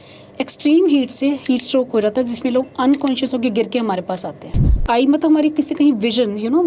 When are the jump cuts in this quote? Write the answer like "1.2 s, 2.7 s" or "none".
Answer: 4.6 s